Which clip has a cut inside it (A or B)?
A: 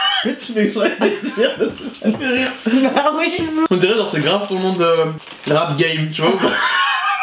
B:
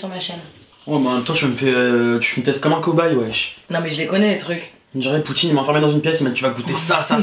A